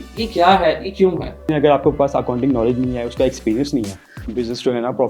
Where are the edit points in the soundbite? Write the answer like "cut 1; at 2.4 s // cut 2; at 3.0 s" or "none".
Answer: cut 1; at 1.5 s // cut 2; at 4.1 s